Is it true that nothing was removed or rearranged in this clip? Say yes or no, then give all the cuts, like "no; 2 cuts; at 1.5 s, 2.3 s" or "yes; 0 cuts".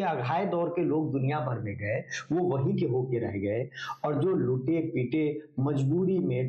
yes; 0 cuts